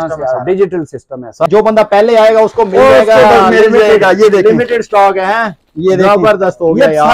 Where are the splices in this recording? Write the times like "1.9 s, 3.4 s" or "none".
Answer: 1.5 s